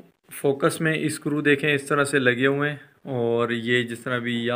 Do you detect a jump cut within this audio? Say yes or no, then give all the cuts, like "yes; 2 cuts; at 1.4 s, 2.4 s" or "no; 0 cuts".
no; 0 cuts